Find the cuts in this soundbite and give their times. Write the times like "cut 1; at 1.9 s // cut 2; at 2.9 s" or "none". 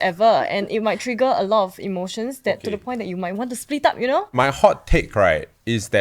cut 1; at 4.3 s